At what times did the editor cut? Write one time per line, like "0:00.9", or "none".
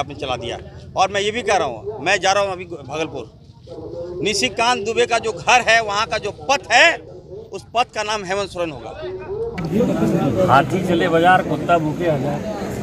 0:09.7

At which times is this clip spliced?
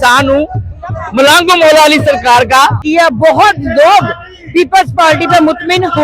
0:02.8

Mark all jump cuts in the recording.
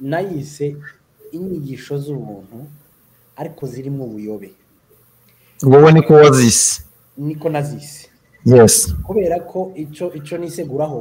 none

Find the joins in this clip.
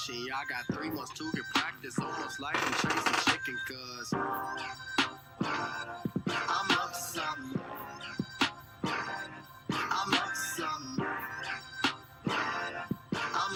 none

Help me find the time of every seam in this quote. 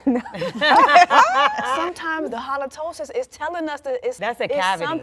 0:01.9
0:04.2

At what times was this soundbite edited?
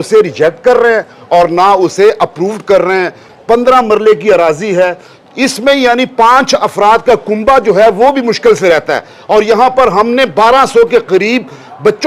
0:03.3

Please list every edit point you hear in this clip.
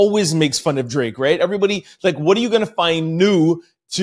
none

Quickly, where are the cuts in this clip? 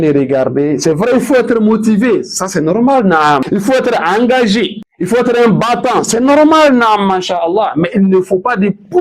0:03.4
0:04.9

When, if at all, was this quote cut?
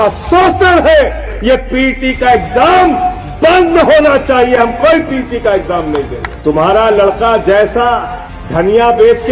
0:01.3
0:06.2

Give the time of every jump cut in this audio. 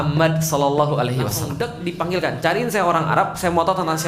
0:01.4

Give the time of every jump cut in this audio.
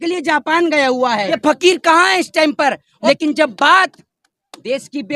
0:01.4
0:02.9

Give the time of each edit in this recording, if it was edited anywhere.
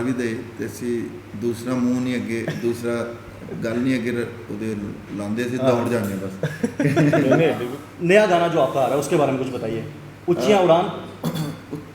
0:07.7

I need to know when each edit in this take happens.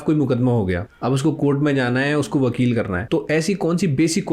0:00.9
0:03.0

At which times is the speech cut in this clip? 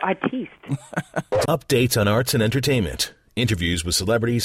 0:01.3

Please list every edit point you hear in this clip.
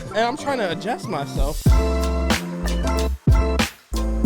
0:01.4

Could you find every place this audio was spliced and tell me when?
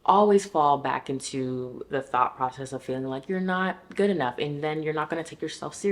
none

